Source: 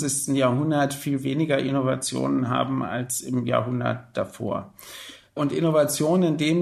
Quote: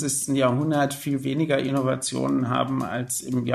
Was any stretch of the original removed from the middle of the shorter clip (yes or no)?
no